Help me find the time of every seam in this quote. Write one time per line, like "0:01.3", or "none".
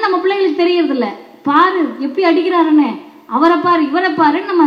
none

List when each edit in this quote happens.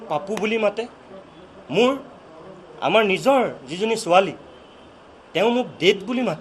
none

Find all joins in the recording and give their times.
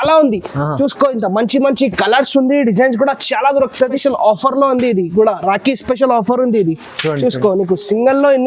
0:04.0

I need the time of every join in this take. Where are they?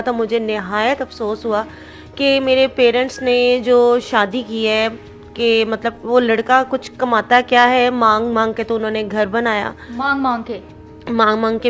none

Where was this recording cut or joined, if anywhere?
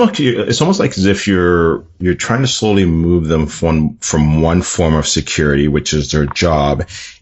none

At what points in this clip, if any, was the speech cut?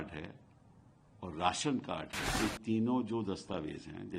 0:02.2

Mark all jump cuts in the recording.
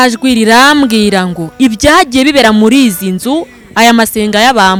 none

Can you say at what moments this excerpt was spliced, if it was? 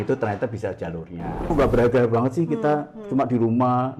0:01.5

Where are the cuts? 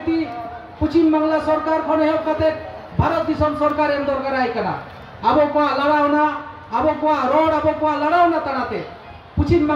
none

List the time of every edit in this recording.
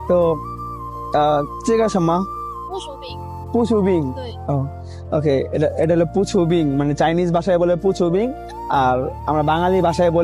none

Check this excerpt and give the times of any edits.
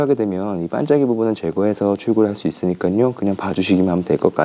none

